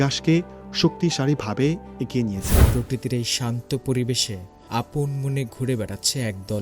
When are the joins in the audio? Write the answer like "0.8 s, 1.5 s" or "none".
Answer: 2.6 s